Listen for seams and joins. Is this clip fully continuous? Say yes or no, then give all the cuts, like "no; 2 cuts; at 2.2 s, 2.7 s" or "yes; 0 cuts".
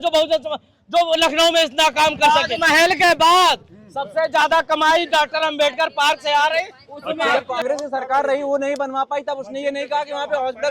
no; 2 cuts; at 2.2 s, 7.3 s